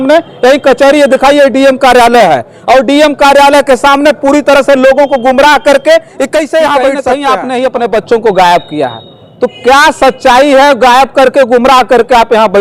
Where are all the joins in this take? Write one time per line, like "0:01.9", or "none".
0:07.1